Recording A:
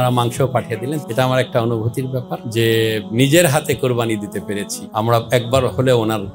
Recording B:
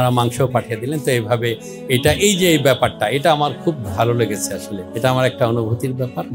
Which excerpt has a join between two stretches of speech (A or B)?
A